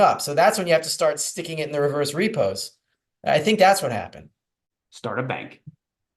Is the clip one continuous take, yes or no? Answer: no